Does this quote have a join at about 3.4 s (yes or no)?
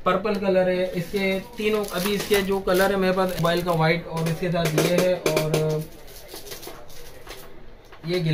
yes